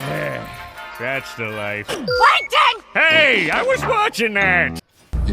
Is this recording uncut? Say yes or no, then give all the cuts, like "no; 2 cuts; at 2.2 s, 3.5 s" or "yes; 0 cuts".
yes; 0 cuts